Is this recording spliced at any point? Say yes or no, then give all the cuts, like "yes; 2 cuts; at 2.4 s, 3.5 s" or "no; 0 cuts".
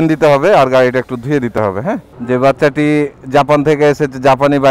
yes; 1 cut; at 2.1 s